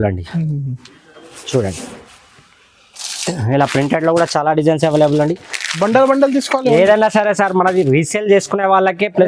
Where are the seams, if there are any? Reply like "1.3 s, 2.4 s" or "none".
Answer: none